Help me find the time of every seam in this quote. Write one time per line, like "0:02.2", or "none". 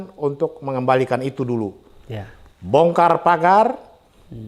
none